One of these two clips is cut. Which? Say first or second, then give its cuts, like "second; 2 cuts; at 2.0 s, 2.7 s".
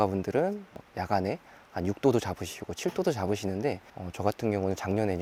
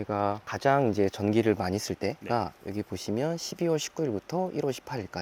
second; 1 cut; at 2.2 s